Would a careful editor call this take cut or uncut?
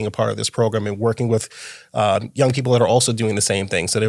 uncut